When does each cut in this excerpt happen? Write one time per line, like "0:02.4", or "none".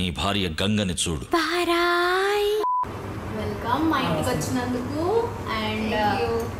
0:02.9